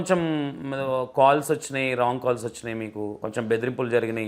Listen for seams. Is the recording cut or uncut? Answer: cut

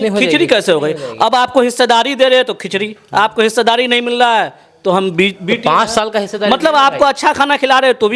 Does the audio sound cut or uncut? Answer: uncut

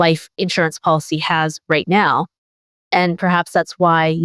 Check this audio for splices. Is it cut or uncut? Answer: uncut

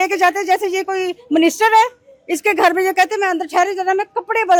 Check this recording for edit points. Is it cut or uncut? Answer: uncut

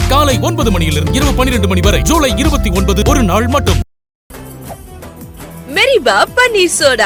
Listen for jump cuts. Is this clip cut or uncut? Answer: uncut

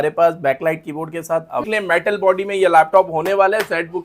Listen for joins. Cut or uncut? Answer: cut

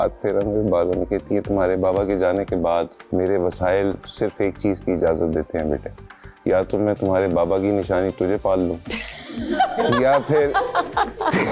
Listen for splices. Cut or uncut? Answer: cut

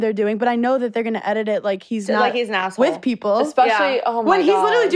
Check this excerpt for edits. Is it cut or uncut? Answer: uncut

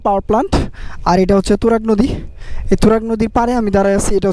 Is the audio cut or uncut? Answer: uncut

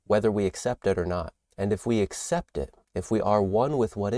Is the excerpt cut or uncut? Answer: cut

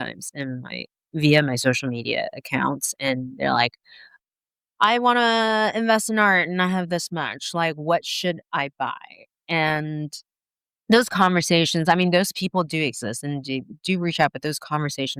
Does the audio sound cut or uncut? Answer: uncut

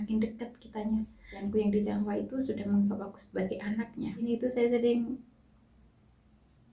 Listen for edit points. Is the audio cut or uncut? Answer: cut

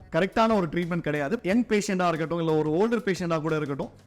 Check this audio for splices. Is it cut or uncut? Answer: cut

